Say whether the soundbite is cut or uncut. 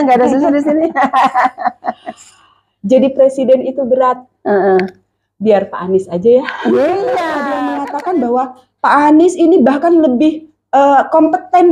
cut